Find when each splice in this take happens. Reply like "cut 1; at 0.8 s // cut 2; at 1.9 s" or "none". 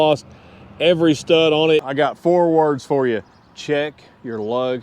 cut 1; at 1.9 s